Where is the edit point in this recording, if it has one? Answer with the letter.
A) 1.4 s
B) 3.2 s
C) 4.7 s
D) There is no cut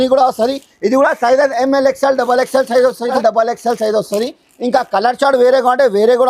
B